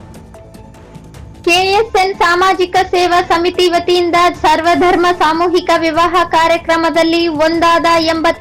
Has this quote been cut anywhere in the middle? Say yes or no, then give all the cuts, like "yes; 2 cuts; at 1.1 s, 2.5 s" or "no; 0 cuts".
yes; 1 cut; at 1.2 s